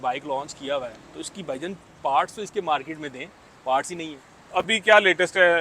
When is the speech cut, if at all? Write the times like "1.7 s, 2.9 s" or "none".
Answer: 4.5 s